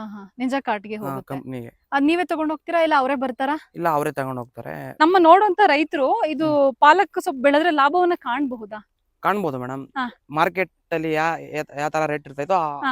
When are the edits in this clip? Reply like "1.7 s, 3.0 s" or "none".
4.9 s